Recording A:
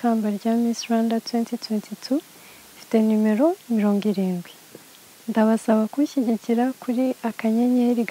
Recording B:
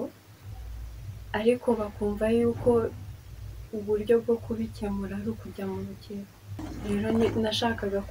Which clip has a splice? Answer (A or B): B